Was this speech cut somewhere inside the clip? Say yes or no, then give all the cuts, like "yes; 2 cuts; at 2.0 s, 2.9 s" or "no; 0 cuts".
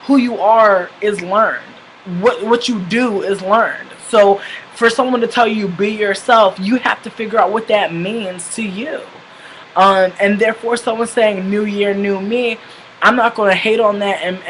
no; 0 cuts